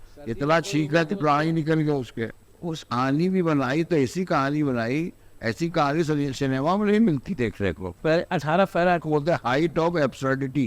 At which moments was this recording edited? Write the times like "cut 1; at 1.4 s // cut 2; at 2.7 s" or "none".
cut 1; at 2.9 s // cut 2; at 9.0 s